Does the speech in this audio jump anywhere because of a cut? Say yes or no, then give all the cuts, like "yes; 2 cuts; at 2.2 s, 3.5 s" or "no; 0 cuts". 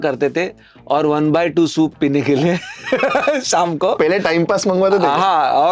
no; 0 cuts